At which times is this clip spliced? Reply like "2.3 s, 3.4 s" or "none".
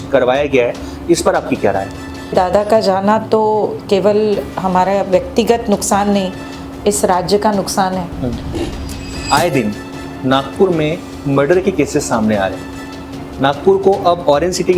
2.3 s, 9.1 s